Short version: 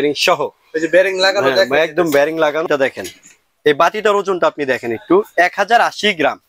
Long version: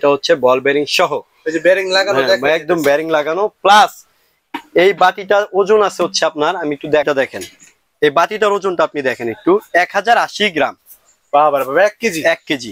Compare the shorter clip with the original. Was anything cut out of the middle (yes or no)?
yes